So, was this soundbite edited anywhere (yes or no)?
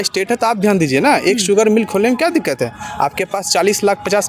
no